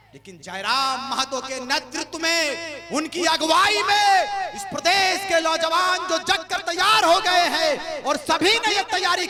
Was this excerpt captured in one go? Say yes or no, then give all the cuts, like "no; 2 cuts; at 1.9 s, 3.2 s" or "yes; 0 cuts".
yes; 0 cuts